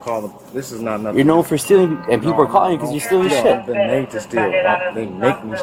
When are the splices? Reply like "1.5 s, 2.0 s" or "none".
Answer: none